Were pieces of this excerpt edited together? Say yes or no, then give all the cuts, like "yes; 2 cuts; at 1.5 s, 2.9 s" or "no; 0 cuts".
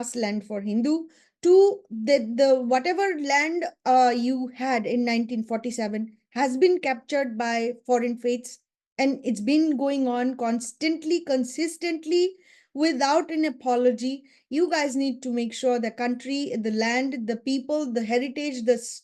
no; 0 cuts